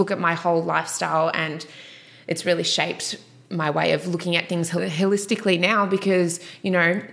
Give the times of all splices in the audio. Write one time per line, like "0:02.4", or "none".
0:04.8

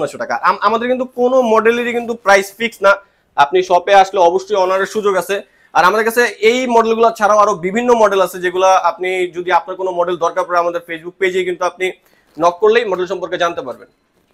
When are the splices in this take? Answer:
none

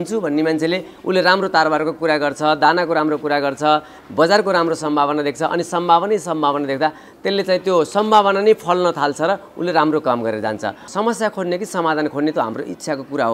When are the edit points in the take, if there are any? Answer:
0:10.8

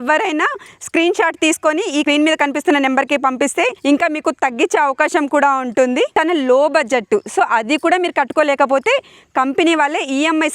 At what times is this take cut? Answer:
0:02.0
0:03.8
0:06.1

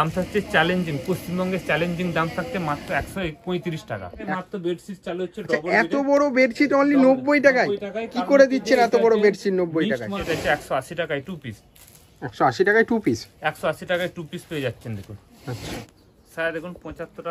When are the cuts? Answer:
0:04.3
0:10.1
0:15.6

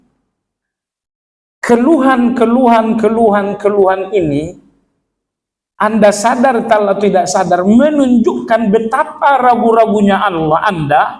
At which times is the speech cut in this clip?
none

